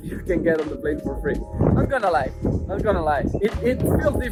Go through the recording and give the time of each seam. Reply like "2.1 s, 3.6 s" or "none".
none

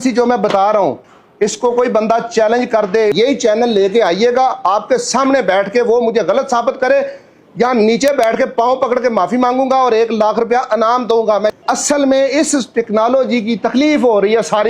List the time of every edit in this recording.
3.1 s, 11.6 s

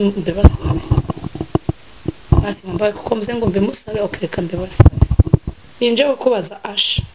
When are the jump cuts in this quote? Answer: 5.6 s

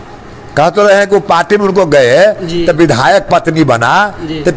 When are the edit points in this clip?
none

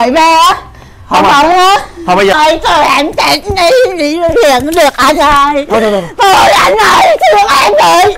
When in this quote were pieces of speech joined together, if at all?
2.3 s

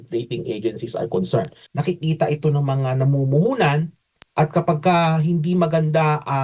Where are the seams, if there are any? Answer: 1.6 s

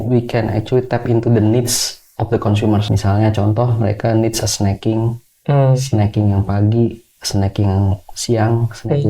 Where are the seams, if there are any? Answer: 2.9 s

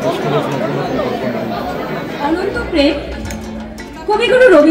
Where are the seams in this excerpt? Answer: 2.2 s

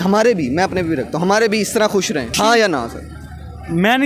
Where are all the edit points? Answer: 2.4 s

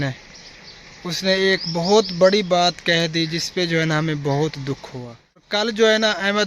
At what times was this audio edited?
5.5 s

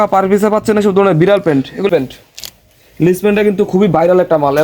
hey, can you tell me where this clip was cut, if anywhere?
1.9 s

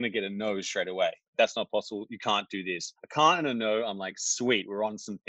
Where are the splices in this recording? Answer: 1.2 s, 2.9 s

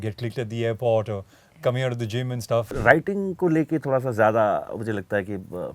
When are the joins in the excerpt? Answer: 2.7 s

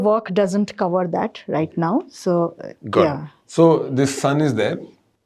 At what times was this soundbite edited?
none

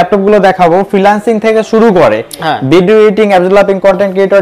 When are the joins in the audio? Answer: none

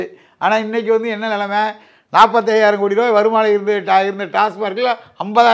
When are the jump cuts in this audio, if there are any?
none

